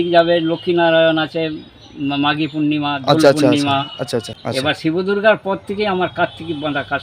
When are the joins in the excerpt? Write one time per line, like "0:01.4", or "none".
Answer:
0:04.4